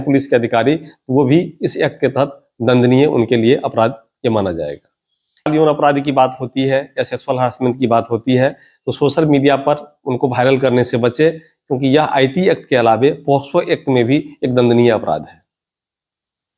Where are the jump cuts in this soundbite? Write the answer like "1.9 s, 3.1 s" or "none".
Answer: 5.5 s

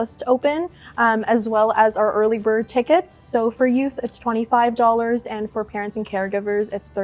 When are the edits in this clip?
none

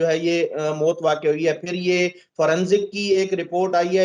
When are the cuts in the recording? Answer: none

